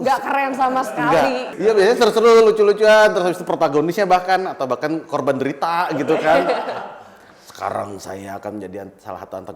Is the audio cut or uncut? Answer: cut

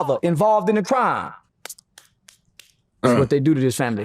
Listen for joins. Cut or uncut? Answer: cut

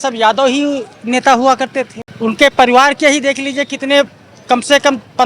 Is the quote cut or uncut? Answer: cut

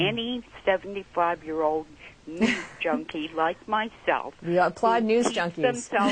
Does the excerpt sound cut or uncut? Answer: cut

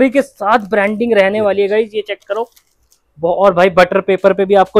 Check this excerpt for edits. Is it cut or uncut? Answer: uncut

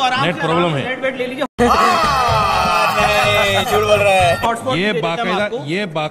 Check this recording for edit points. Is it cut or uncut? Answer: uncut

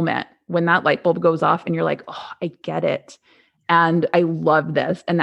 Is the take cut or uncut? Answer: cut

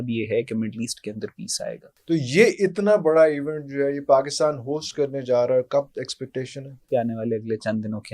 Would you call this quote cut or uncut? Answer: cut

